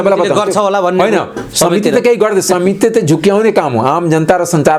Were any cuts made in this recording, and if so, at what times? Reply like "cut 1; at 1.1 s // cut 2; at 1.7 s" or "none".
none

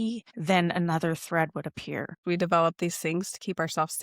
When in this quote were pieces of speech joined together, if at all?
cut 1; at 2.2 s

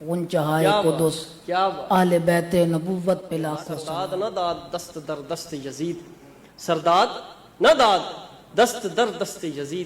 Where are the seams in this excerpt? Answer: cut 1; at 3.7 s

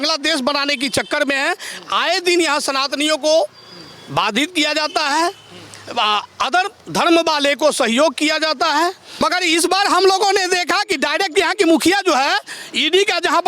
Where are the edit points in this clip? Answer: cut 1; at 9.2 s

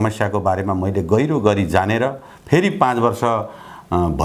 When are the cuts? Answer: none

